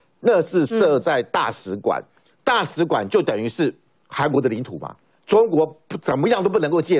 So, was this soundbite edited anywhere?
no; 0 cuts

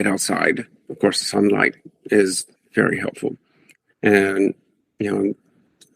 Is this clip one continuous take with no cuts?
no; 1 cut; at 2.5 s

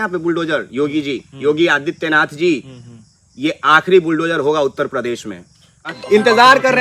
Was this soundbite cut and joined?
yes; 1 cut; at 5.9 s

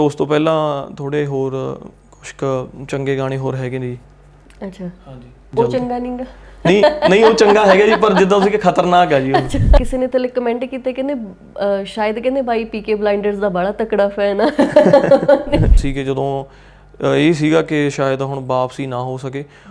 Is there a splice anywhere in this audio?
yes; 2 cuts; at 9.8 s, 15.8 s

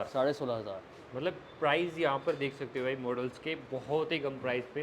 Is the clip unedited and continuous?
yes; 0 cuts

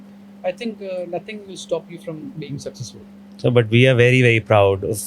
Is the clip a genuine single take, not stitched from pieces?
yes; 0 cuts

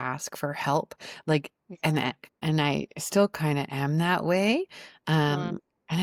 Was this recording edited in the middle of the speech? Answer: no; 0 cuts

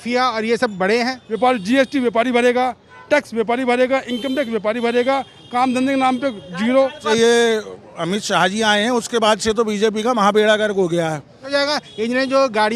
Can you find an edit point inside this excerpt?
yes; 3 cuts; at 1.2 s, 7.0 s, 11.4 s

